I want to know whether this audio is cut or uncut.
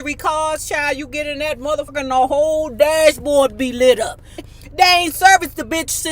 cut